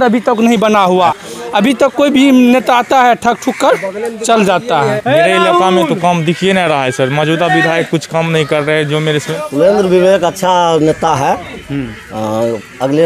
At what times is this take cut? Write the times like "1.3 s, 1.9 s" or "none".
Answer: 1.2 s, 5.0 s, 9.3 s